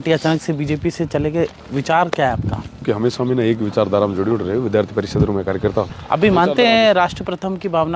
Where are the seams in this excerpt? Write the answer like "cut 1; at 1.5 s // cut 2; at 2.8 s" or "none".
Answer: cut 1; at 2.8 s // cut 2; at 6.0 s